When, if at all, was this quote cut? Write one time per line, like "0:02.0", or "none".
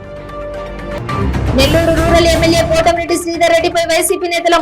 0:00.9